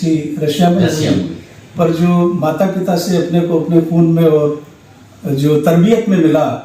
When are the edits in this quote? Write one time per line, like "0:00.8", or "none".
none